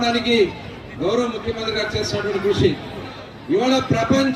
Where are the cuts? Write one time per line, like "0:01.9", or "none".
0:03.1